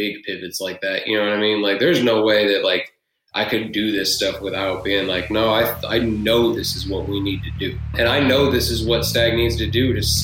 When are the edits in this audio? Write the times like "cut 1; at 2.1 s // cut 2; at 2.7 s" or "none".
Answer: cut 1; at 7.9 s